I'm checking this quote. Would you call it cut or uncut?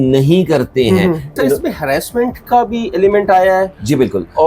cut